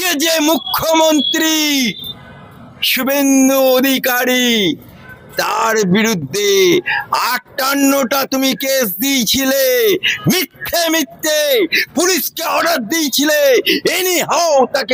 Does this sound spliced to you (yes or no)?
no